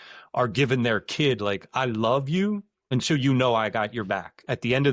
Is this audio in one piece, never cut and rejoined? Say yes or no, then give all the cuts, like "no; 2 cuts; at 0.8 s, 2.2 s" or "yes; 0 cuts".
no; 1 cut; at 2.7 s